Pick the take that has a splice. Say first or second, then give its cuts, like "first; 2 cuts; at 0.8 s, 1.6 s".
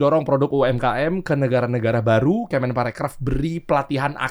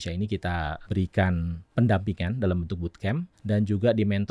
second; 3 cuts; at 0.8 s, 1.6 s, 3.3 s